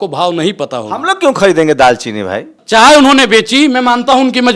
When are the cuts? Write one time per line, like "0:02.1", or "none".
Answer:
0:02.5

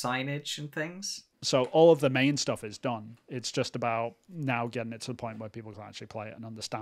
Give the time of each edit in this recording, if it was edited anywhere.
0:01.3

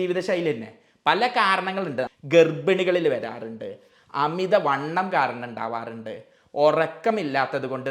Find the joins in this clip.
0:02.1

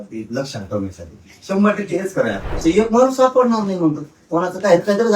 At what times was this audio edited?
0:02.6

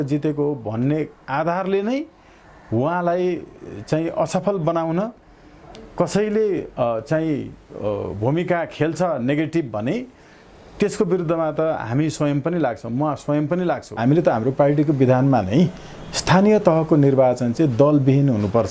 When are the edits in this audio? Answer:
0:14.0

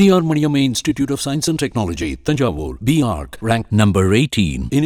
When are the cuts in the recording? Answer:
none

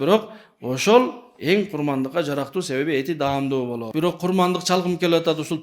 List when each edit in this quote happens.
0:03.8

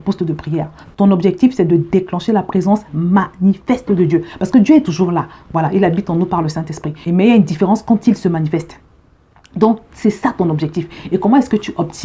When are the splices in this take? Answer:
none

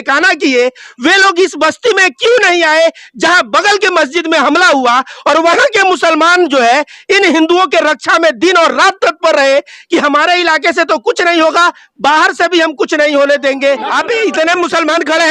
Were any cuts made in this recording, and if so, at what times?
0:13.9

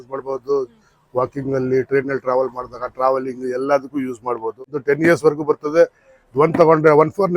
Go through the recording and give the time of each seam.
0:04.7

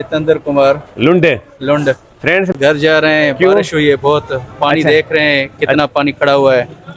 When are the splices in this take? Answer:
0:02.5

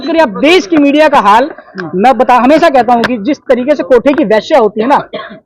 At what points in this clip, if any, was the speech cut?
0:03.1

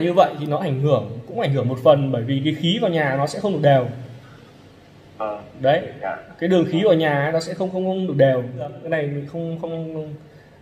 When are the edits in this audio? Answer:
0:08.8

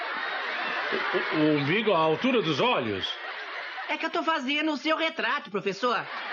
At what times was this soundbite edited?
0:05.2

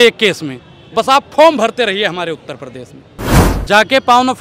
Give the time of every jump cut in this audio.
0:03.4

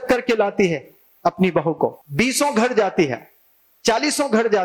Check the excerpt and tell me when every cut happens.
0:02.0

